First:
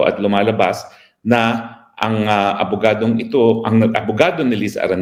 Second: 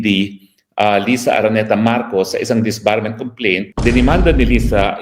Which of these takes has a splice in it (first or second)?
second